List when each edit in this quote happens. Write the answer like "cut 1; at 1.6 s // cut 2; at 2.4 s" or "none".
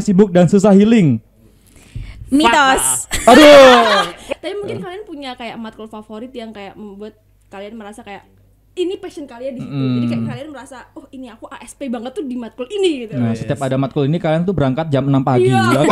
cut 1; at 4.2 s